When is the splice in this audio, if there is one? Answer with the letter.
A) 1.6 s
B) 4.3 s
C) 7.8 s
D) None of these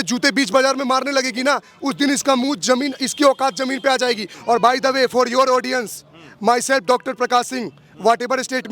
B